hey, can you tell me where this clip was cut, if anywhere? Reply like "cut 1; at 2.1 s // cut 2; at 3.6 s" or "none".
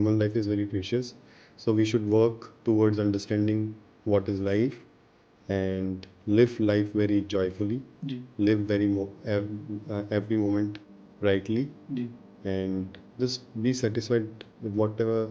cut 1; at 13.0 s